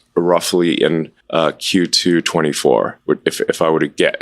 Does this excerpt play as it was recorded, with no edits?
no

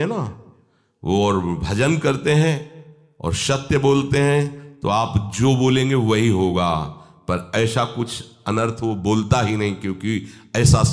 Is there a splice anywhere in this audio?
no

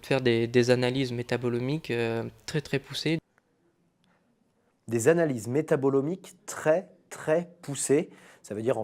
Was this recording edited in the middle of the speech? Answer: no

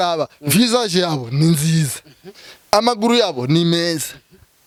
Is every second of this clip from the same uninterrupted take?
yes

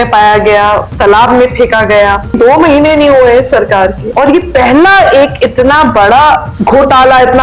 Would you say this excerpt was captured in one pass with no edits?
no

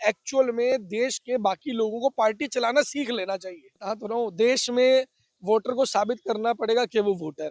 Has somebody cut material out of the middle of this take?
yes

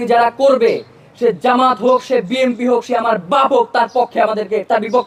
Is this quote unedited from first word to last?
yes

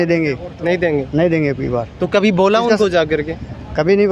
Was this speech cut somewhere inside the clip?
no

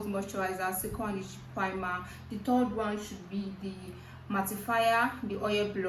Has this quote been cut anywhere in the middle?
no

